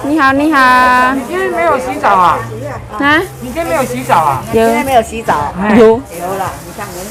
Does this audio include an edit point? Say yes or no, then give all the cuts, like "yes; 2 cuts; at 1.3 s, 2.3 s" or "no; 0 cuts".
no; 0 cuts